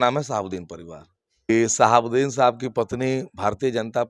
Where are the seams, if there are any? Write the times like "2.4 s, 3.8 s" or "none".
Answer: 1.5 s